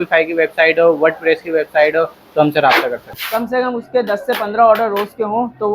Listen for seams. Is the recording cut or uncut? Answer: cut